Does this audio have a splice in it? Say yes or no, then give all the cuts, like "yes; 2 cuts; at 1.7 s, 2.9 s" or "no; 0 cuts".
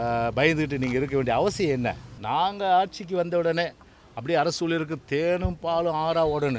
yes; 1 cut; at 2.1 s